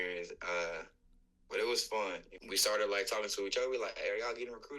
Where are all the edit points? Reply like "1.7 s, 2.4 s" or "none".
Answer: 2.3 s